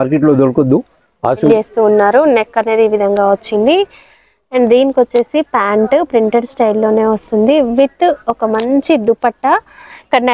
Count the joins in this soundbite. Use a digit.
1